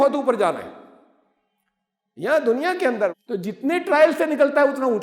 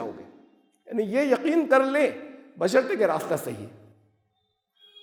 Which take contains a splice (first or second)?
first